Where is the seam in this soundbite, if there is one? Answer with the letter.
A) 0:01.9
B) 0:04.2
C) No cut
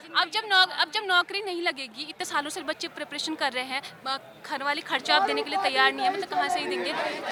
C